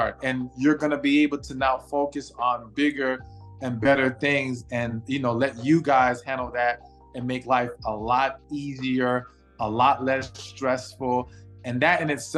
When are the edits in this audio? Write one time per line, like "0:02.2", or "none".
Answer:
none

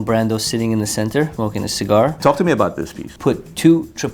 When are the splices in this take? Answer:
0:01.9
0:03.1

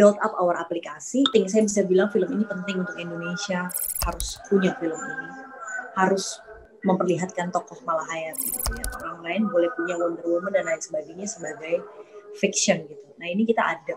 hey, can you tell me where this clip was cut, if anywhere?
0:01.3

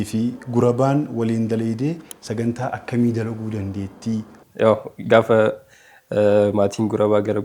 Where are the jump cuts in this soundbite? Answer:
0:04.4

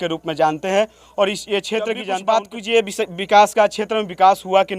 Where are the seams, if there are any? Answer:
0:02.0

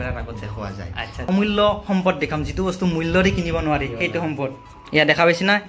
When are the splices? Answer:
0:01.3

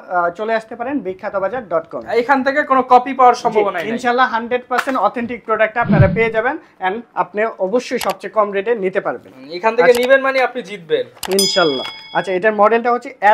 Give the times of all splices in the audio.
none

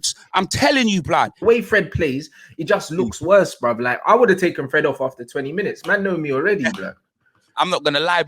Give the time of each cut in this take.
0:01.4

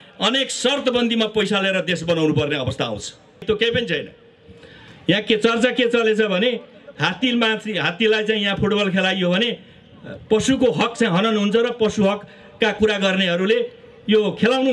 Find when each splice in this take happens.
0:03.4

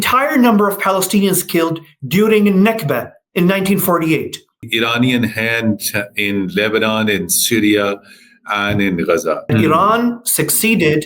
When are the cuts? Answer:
0:04.7
0:09.5

